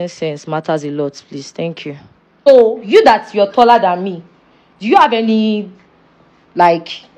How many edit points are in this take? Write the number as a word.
one